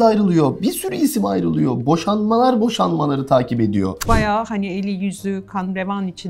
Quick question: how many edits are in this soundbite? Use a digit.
1